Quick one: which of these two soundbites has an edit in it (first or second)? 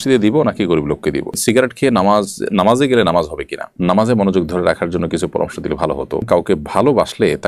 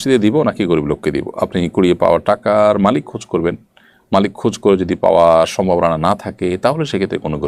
first